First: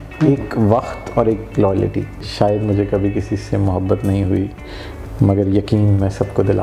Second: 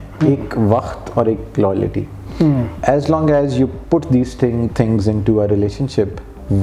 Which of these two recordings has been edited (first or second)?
first